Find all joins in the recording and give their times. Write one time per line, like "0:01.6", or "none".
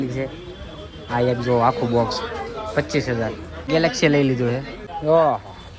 0:03.7
0:04.7

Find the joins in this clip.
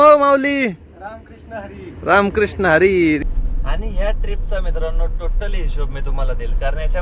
0:03.2

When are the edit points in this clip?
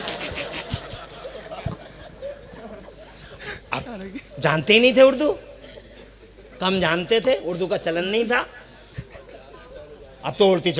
none

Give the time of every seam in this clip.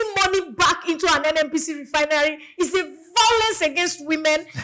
none

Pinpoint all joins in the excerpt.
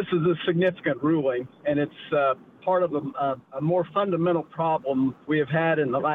0:05.2

